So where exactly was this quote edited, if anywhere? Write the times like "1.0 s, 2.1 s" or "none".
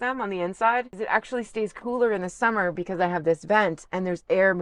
0.9 s